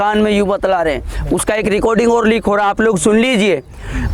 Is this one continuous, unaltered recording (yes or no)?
yes